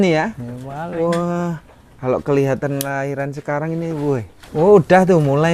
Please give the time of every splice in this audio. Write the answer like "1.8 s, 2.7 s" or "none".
4.4 s